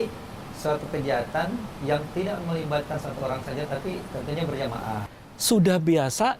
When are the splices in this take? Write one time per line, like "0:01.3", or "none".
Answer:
0:05.0